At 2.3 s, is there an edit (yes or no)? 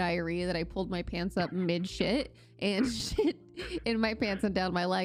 no